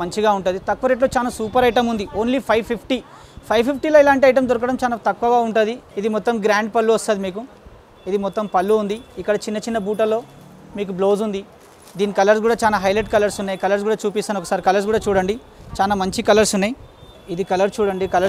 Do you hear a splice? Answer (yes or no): no